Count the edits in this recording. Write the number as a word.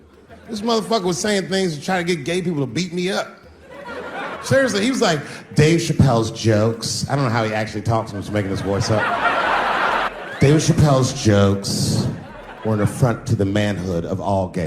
two